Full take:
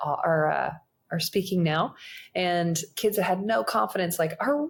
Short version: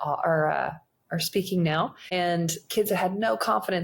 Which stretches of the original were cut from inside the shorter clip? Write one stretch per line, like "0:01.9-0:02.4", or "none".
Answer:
0:02.0-0:02.3